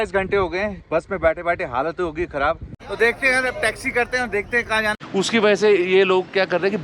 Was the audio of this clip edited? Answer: yes; 2 cuts; at 2.8 s, 5.0 s

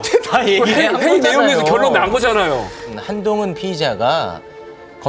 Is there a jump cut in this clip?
yes; 1 cut; at 3.0 s

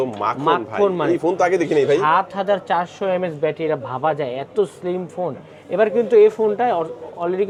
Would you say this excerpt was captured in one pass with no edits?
yes; 0 cuts

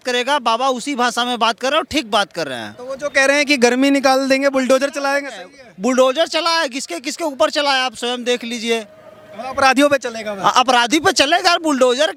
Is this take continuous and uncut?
yes; 0 cuts

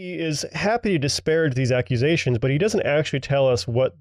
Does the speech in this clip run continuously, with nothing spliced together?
yes; 0 cuts

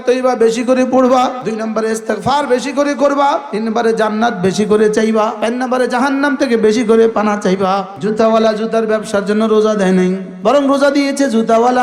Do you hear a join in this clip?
yes; 5 cuts; at 1.4 s, 3.5 s, 5.4 s, 7.9 s, 10.3 s

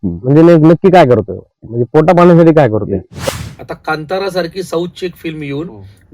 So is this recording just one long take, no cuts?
no; 1 cut; at 3.1 s

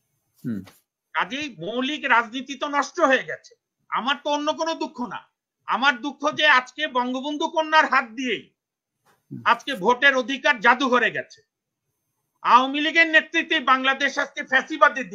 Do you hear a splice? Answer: no; 0 cuts

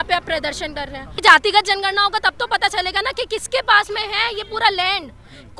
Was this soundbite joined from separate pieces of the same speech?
yes; 1 cut; at 1.2 s

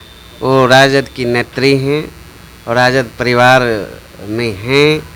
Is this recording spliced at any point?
no; 0 cuts

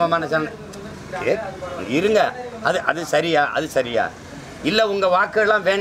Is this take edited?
no; 0 cuts

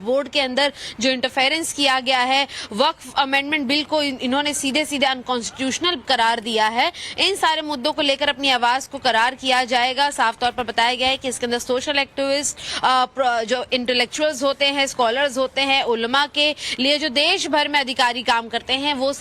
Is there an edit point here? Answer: yes; 1 cut; at 14.6 s

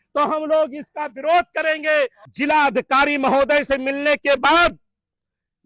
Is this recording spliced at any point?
yes; 1 cut; at 2.2 s

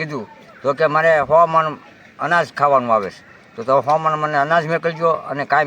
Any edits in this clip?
no; 0 cuts

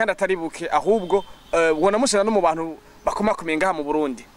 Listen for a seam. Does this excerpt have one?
no; 0 cuts

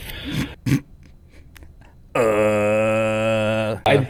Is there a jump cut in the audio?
no; 0 cuts

